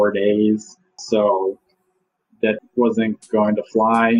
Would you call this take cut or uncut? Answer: cut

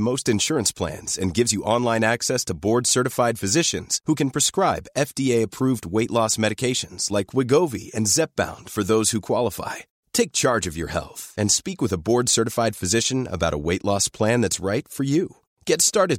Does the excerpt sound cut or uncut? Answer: uncut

